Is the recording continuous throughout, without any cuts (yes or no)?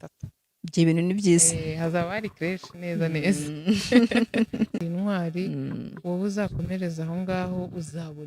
no